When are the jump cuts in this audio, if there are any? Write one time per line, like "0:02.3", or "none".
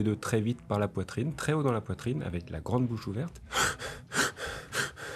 none